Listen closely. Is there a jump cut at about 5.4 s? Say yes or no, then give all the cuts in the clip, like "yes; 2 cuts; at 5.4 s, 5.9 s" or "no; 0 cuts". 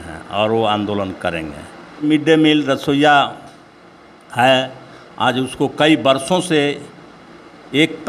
no; 1 cut; at 2.0 s